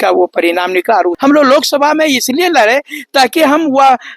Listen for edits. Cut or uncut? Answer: cut